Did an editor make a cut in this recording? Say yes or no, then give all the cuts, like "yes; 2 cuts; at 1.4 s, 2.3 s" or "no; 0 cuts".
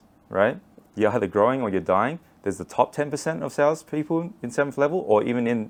no; 0 cuts